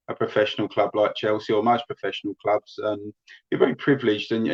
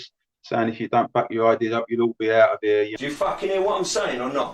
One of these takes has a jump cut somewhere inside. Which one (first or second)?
second